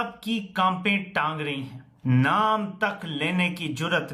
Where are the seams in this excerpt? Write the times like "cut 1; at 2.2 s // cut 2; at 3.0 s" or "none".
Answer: none